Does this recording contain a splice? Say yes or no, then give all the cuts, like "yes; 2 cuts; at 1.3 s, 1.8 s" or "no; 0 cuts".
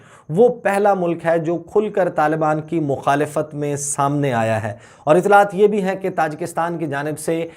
no; 0 cuts